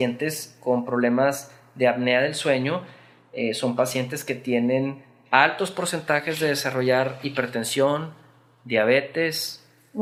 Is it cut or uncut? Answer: uncut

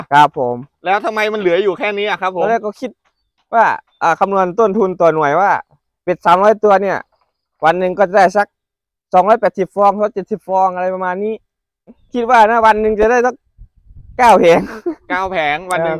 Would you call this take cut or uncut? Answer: cut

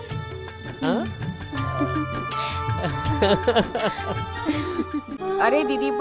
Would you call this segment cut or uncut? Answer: cut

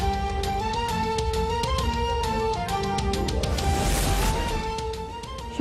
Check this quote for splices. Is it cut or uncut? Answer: cut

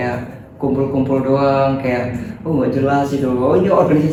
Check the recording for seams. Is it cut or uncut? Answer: uncut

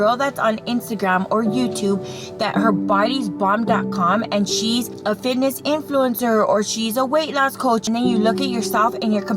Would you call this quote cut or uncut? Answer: cut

